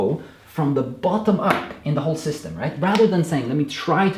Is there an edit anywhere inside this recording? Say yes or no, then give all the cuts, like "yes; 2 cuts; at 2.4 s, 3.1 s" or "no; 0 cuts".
no; 0 cuts